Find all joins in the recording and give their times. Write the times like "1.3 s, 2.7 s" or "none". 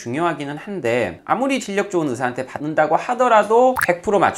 none